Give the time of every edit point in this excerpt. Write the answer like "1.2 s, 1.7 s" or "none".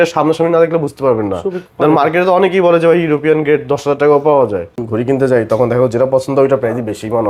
4.8 s